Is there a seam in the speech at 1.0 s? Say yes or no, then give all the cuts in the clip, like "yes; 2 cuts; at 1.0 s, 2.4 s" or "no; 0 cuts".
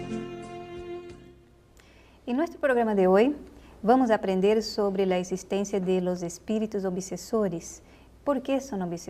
yes; 1 cut; at 1.0 s